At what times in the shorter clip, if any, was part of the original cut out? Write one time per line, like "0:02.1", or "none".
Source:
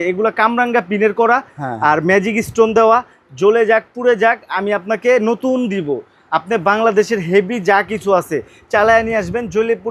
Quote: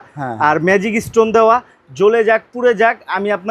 none